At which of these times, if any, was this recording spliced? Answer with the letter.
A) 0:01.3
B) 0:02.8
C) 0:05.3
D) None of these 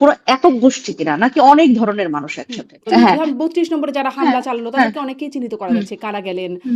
B